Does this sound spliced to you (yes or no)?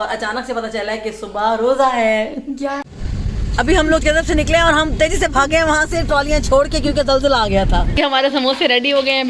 yes